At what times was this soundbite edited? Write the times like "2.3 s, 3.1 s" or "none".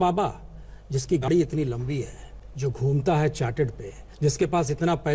1.3 s, 4.0 s